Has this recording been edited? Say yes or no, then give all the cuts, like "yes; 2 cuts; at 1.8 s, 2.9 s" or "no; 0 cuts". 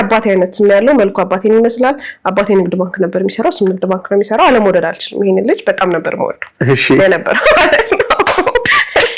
no; 0 cuts